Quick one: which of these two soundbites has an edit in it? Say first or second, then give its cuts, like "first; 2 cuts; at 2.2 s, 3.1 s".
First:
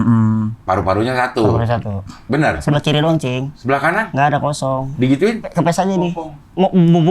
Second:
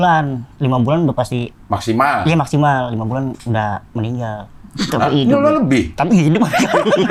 first; 3 cuts; at 2.6 s, 3.9 s, 5.5 s